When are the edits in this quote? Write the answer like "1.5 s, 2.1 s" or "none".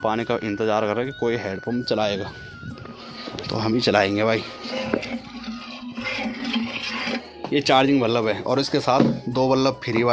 5.2 s, 7.1 s